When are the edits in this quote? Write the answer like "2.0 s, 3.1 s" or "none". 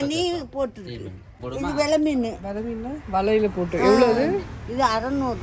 1.3 s